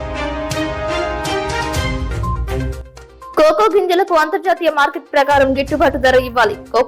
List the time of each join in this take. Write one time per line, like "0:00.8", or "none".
0:03.3